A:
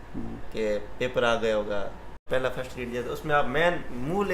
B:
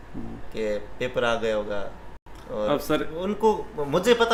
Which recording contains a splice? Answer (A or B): A